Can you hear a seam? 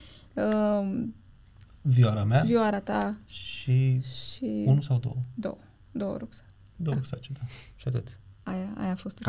no; 0 cuts

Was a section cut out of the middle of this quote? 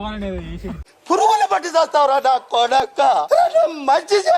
yes; 2 cuts; at 0.9 s, 3.2 s

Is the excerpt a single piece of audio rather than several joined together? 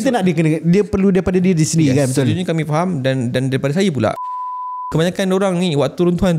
no; 1 cut; at 4.7 s

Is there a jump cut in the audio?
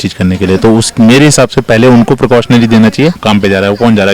yes; 1 cut; at 3.2 s

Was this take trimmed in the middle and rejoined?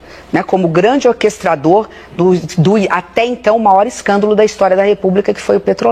no; 0 cuts

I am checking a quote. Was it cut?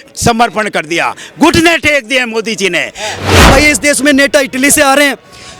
yes; 1 cut; at 3.3 s

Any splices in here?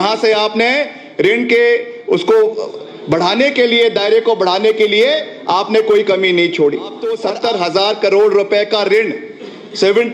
yes; 1 cut; at 7.2 s

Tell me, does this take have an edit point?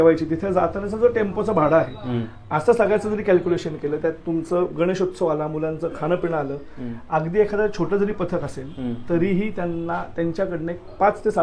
no; 0 cuts

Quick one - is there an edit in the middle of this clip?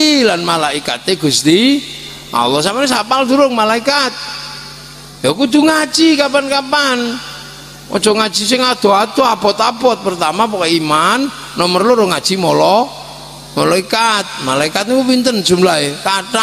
no; 0 cuts

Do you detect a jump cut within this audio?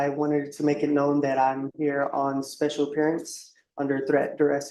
no; 0 cuts

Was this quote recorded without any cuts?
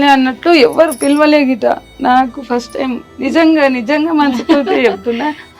yes; 0 cuts

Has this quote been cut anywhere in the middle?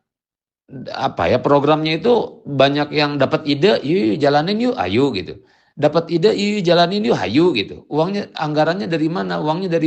no; 0 cuts

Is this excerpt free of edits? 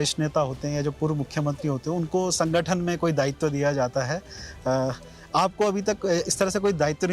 yes; 0 cuts

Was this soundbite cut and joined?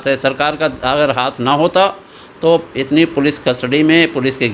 no; 0 cuts

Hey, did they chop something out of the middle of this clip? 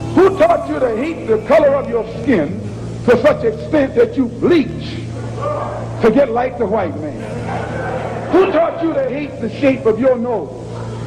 no; 0 cuts

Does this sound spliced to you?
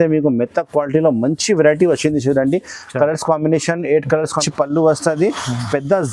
yes; 1 cut; at 4.4 s

